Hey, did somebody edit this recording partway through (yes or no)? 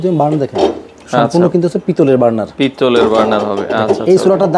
no